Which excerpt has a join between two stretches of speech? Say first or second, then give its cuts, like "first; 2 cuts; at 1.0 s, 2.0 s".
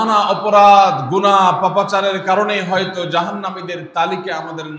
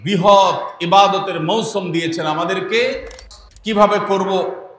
second; 1 cut; at 3.1 s